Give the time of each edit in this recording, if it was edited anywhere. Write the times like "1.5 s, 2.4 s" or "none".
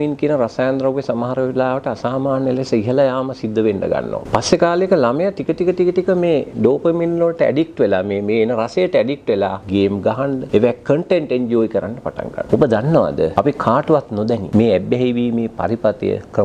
4.2 s, 10.0 s, 12.4 s, 13.3 s, 14.4 s